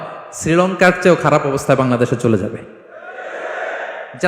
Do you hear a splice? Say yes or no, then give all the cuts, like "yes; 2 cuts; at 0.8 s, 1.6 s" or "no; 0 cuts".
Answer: no; 0 cuts